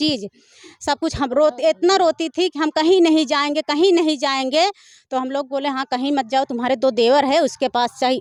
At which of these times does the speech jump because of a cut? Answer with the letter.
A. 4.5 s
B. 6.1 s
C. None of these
C